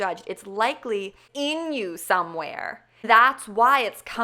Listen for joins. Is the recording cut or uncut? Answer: cut